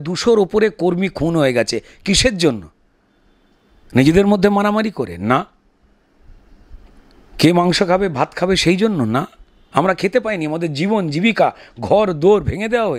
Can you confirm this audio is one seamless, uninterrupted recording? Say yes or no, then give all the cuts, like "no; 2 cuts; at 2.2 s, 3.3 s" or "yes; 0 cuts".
yes; 0 cuts